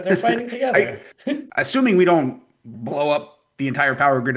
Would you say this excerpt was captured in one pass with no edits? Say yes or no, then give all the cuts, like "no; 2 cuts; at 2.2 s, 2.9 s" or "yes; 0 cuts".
no; 1 cut; at 1.5 s